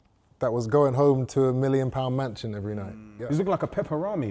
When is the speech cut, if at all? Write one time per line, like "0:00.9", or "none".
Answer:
0:03.2

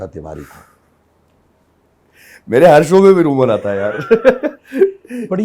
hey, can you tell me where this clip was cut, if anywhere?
none

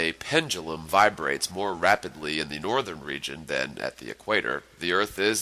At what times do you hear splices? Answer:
0:01.8

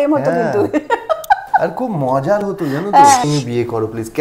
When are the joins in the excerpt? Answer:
0:03.2

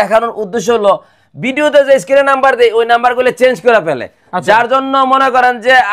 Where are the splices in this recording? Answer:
none

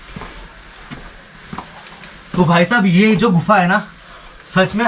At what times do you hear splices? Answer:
0:01.3

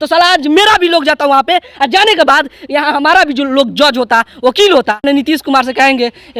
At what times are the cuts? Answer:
0:05.0

